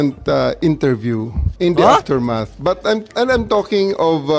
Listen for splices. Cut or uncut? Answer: uncut